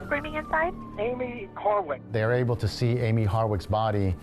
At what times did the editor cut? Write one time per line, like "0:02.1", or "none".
0:00.9
0:02.0